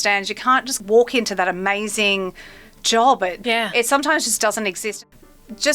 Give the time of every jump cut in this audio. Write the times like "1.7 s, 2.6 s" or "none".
3.4 s, 4.8 s